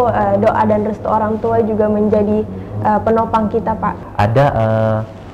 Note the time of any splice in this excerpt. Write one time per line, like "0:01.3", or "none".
0:04.0